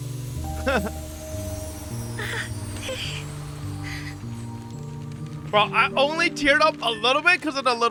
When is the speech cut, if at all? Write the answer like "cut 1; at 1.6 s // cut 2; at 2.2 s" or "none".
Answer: none